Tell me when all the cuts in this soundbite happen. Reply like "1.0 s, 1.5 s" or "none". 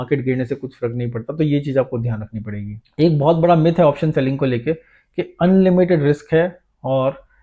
none